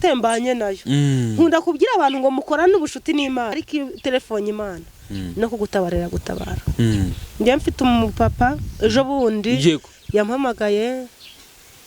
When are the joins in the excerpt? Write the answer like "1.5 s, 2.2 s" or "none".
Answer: 3.6 s